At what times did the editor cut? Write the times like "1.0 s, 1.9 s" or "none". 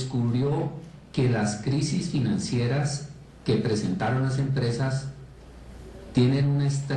4.4 s